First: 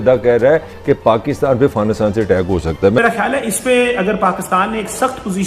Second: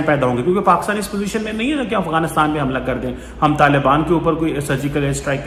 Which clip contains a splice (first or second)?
first